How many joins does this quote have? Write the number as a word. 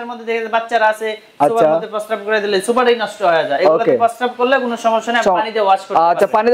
zero